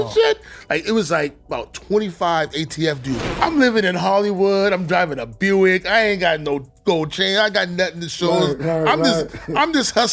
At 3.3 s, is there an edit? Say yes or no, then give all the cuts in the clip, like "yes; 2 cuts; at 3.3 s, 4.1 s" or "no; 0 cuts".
yes; 1 cut; at 3.3 s